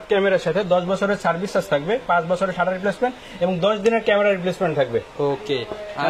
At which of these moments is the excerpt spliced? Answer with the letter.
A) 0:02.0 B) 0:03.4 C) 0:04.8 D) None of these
D